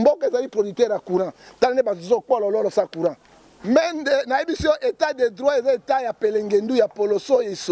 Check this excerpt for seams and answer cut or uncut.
cut